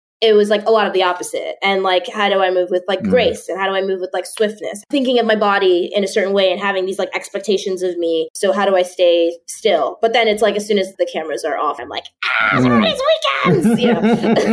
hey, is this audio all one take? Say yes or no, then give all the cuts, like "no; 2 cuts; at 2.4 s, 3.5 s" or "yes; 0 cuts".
no; 4 cuts; at 4.8 s, 8.3 s, 10.9 s, 11.8 s